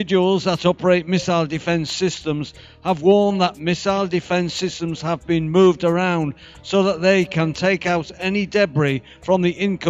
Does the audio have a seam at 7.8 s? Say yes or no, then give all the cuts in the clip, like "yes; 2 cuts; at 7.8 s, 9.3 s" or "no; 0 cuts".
no; 1 cut; at 1.5 s